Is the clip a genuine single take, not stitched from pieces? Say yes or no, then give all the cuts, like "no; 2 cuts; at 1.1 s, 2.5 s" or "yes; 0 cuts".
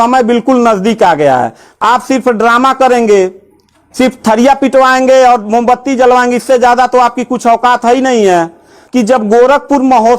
no; 2 cuts; at 1.7 s, 8.8 s